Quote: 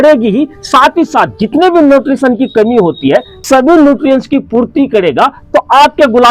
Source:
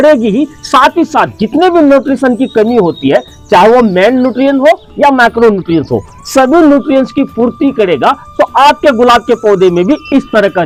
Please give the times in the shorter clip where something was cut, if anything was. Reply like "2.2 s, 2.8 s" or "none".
3.3 s

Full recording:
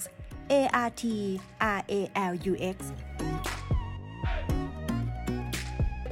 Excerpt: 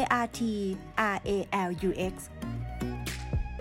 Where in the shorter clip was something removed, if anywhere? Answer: 2.3 s

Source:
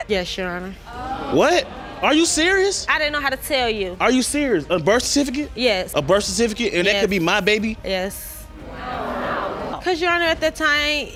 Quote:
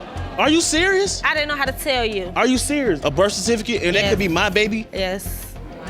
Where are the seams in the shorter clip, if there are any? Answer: 3.0 s

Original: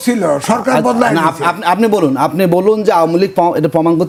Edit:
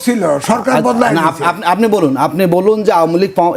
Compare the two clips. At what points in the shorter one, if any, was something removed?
none

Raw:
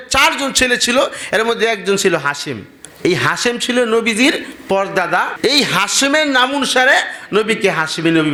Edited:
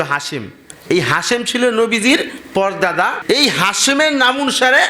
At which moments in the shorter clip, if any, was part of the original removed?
none

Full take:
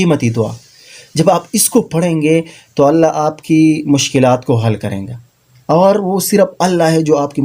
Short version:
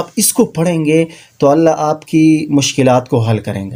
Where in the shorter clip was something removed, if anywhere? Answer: none

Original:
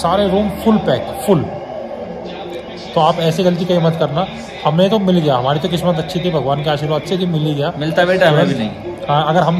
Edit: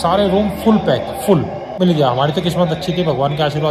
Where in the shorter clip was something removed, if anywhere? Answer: 1.8 s

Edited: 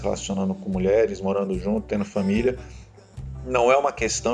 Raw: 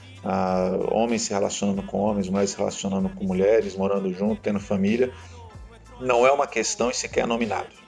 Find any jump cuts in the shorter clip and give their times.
none

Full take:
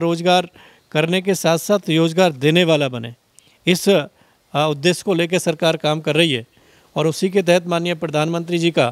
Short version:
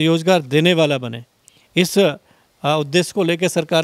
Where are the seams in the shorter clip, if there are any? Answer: none

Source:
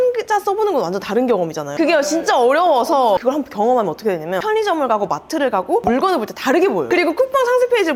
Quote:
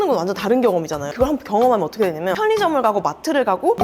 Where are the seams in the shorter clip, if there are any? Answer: 1.1 s

